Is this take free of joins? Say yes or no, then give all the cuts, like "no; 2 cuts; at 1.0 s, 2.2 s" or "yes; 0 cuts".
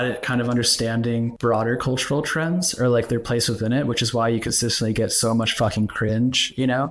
no; 1 cut; at 1.3 s